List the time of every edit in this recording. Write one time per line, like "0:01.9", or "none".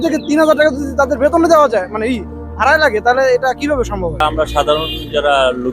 0:04.0